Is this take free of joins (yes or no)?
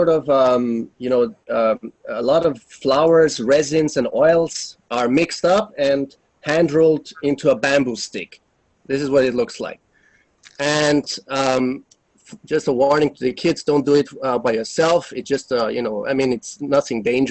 no